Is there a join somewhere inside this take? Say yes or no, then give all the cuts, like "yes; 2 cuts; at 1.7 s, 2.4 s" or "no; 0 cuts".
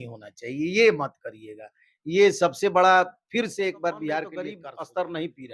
yes; 1 cut; at 4.6 s